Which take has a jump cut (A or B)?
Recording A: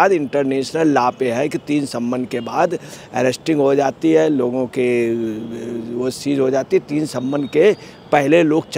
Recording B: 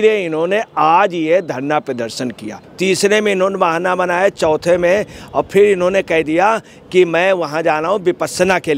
B